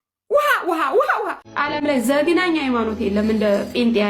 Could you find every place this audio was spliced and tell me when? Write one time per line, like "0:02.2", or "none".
0:01.4